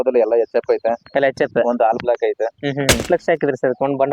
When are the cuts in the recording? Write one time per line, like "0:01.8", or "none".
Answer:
0:03.0